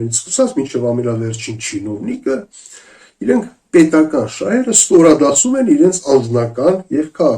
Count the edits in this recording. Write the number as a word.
zero